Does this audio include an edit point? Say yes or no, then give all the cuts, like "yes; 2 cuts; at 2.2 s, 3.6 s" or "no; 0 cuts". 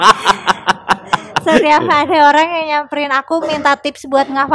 no; 0 cuts